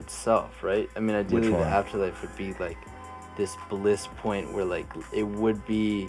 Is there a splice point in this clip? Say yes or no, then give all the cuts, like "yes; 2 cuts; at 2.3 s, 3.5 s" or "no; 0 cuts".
no; 0 cuts